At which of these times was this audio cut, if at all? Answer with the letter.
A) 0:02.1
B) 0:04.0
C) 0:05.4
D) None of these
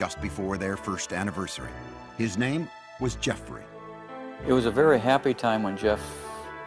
B